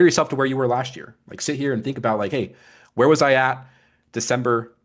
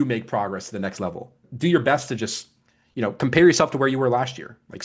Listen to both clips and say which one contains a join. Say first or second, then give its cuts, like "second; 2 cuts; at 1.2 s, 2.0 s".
second; 1 cut; at 1.4 s